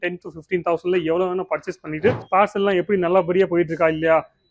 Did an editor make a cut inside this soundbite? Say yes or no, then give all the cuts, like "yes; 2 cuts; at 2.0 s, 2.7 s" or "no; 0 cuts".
yes; 1 cut; at 2.2 s